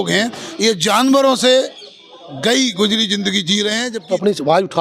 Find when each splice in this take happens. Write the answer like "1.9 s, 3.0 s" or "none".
3.9 s